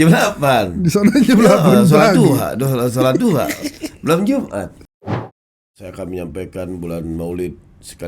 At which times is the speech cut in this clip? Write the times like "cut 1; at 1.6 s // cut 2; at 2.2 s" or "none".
cut 1; at 5.3 s